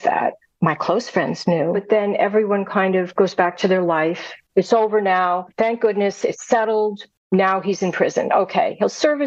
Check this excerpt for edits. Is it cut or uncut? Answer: cut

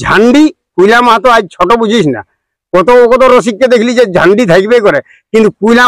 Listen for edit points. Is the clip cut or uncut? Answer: uncut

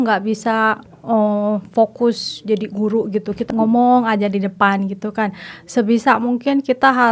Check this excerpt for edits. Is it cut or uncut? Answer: cut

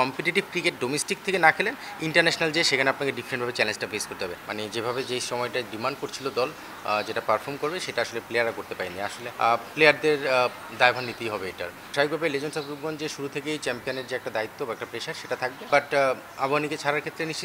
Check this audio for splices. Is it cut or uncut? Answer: cut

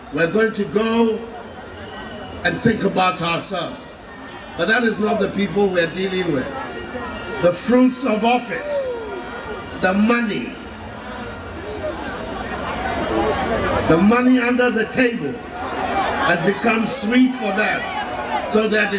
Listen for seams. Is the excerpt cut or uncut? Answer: uncut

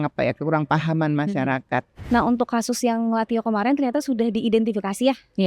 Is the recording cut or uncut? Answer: cut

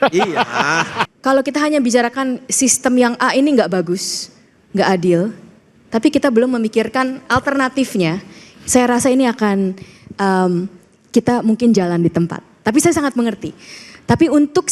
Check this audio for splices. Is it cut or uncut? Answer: cut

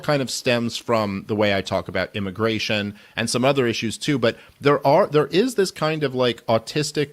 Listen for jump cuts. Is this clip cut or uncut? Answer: cut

